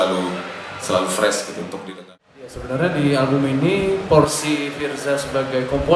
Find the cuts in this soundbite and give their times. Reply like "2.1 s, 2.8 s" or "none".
1.9 s